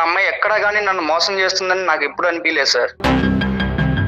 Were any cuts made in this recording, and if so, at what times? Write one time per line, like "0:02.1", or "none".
0:03.0

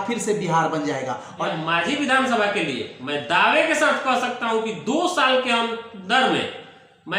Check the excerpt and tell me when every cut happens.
0:01.5

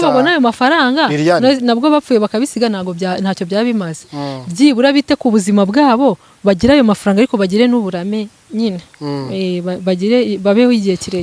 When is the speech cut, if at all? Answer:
none

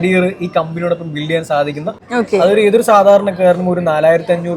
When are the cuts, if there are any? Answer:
0:01.9

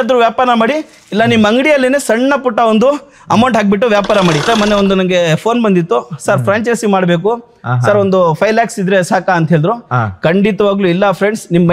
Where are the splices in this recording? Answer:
0:04.5

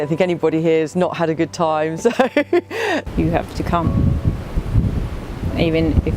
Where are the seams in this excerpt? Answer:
0:02.9

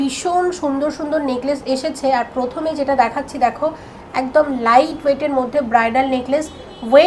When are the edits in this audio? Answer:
none

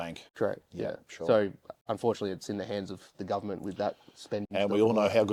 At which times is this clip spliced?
none

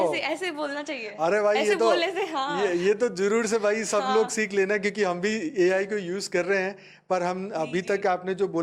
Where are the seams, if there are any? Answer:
none

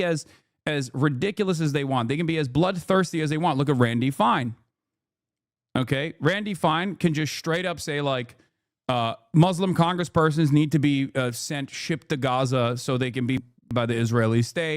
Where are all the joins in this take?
0:13.7

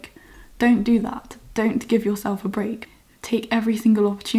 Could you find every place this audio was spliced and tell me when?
0:02.8

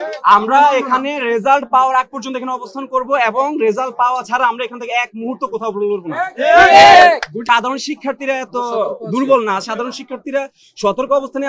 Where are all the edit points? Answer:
0:07.4

